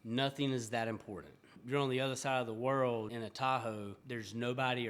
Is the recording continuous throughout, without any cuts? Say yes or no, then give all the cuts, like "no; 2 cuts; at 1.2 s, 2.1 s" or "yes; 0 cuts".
no; 3 cuts; at 1.6 s, 3.1 s, 4.0 s